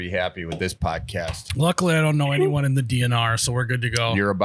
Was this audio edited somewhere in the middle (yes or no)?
no